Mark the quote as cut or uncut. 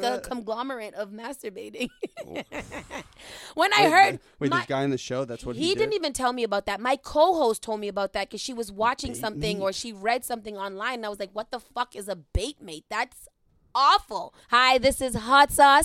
cut